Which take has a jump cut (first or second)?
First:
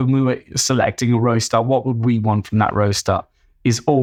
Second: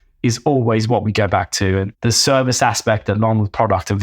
second